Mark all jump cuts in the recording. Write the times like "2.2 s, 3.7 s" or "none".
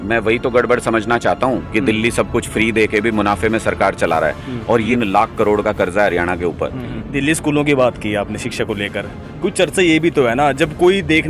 4.9 s, 6.9 s

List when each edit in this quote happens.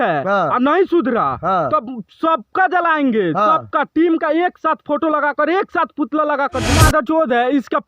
6.9 s

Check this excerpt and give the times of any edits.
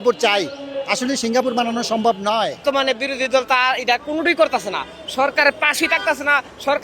2.6 s

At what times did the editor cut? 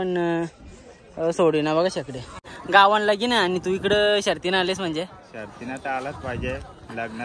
2.5 s

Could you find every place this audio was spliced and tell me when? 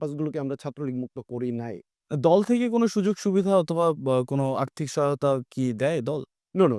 1.9 s

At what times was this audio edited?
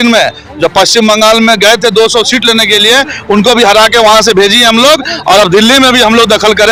none

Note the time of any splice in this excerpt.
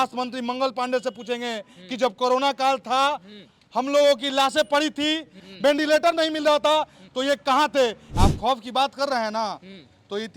5.5 s, 8.0 s

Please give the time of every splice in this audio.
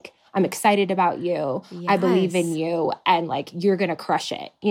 none

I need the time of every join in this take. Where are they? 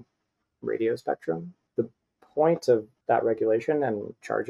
1.6 s, 2.9 s

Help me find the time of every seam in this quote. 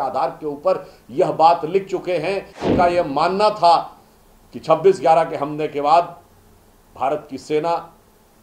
2.6 s

